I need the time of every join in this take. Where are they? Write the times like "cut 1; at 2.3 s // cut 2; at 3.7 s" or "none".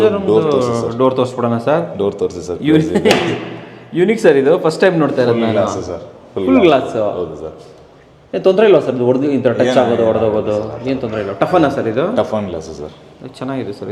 none